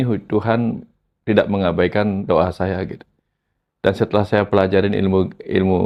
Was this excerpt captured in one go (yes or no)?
yes